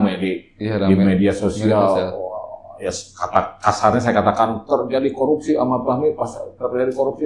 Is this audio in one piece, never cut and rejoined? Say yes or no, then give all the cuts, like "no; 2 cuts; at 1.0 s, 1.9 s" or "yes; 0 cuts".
yes; 0 cuts